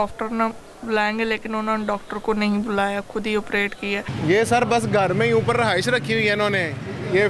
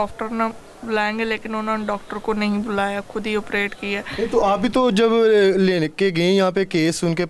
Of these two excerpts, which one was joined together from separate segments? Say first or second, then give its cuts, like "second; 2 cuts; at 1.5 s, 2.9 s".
first; 1 cut; at 4.0 s